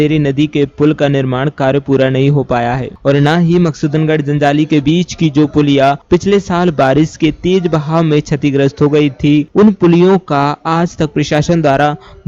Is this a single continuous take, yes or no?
yes